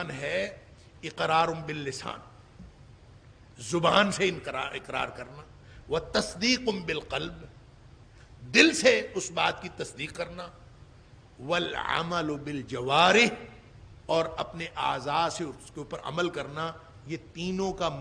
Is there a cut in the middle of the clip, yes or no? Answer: no